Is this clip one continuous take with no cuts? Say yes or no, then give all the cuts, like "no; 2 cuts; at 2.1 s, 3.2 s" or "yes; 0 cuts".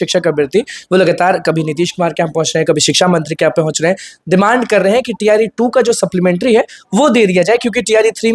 yes; 0 cuts